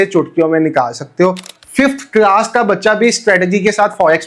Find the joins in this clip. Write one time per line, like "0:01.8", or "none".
0:01.5